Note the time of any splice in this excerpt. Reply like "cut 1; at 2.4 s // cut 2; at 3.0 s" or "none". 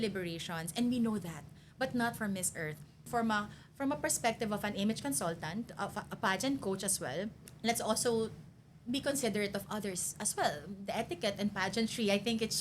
cut 1; at 3.1 s // cut 2; at 7.4 s